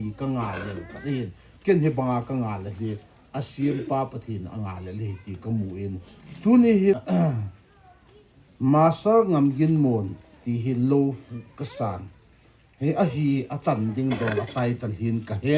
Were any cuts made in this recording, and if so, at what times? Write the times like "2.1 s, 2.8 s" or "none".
7.0 s